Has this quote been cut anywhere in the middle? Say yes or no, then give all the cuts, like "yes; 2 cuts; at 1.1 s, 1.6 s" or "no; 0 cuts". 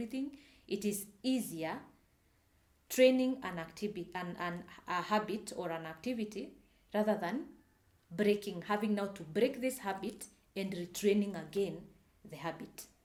no; 0 cuts